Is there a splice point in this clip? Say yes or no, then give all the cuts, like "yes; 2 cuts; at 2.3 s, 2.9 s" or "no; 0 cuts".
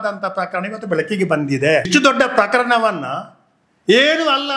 yes; 1 cut; at 1.9 s